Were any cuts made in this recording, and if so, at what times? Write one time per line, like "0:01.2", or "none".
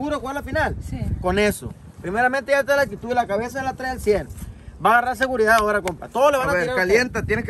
none

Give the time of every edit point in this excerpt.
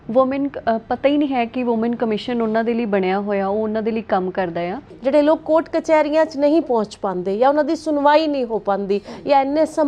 0:04.9

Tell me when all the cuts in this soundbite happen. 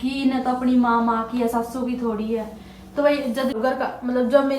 0:03.6

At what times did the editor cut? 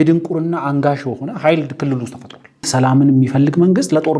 0:02.6

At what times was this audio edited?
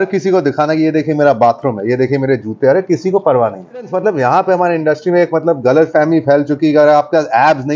0:03.9

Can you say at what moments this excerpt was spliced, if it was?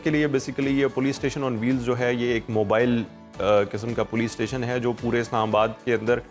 none

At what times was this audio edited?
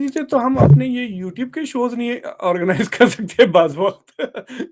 none

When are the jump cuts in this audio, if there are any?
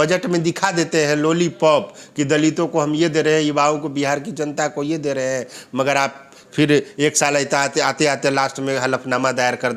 none

